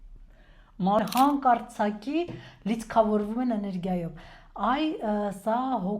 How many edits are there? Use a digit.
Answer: 1